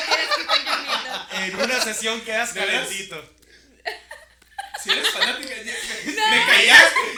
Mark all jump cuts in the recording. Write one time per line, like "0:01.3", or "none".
none